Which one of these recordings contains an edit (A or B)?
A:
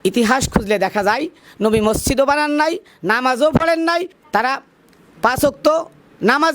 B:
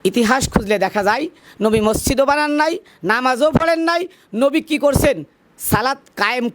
A